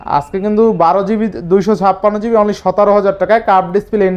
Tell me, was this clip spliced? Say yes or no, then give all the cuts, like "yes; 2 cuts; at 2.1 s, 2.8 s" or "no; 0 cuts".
no; 0 cuts